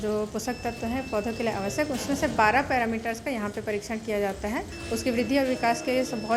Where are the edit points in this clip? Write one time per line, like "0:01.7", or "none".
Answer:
0:04.8